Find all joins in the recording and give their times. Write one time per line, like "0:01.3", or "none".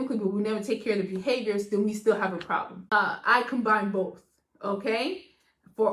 0:02.7